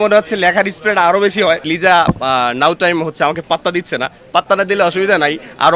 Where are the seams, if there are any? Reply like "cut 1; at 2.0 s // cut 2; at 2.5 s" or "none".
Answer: cut 1; at 1.7 s

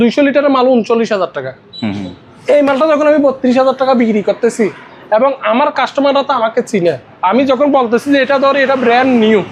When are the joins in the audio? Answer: none

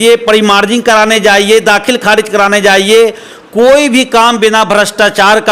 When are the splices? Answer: none

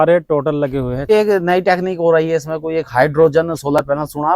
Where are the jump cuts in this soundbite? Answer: cut 1; at 1.1 s

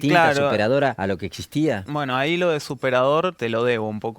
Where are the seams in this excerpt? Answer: cut 1; at 1.0 s // cut 2; at 1.8 s // cut 3; at 3.4 s

